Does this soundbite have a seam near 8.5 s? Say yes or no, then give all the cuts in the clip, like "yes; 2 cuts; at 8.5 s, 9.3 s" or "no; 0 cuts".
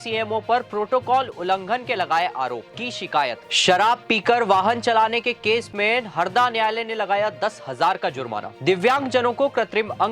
yes; 2 cuts; at 3.4 s, 8.5 s